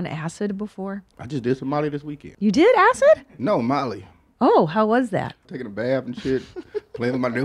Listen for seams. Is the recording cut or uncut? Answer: cut